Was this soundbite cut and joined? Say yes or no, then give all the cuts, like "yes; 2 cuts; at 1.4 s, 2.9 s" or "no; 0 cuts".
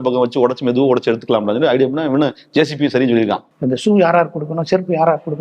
yes; 1 cut; at 3.5 s